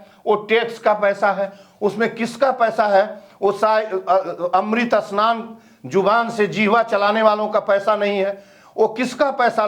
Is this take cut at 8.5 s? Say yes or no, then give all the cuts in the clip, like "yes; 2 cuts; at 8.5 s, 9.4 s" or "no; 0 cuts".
no; 0 cuts